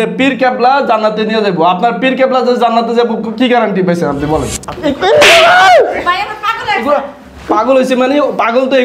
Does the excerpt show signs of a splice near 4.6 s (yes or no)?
yes